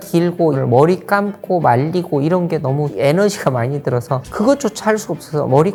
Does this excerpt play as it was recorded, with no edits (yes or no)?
yes